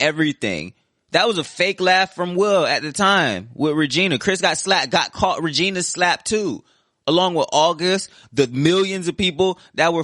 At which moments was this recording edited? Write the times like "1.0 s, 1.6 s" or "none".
none